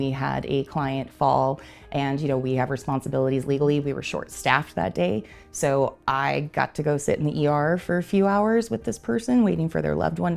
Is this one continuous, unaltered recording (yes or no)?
yes